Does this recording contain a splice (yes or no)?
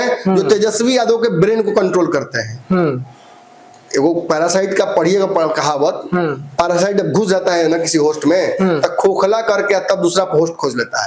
no